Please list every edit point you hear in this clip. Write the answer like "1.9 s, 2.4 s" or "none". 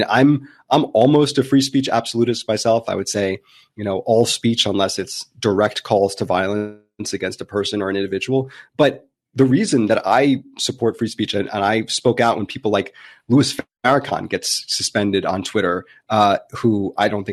none